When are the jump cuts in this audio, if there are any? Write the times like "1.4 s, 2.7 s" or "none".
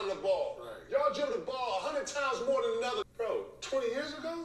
3.0 s